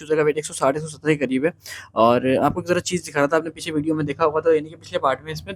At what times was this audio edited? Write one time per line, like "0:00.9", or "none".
none